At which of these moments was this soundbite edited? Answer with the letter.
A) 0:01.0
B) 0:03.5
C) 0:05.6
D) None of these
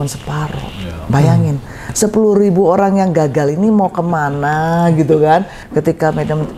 C